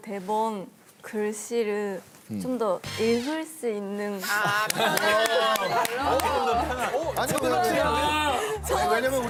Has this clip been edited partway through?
no; 0 cuts

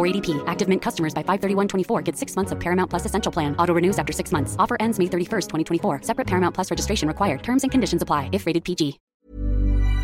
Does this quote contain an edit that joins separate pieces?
yes; 1 cut; at 9.1 s

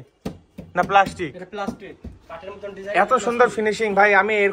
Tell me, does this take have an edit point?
no; 0 cuts

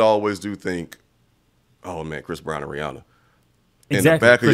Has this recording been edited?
no; 0 cuts

